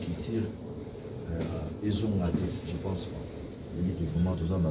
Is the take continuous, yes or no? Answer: yes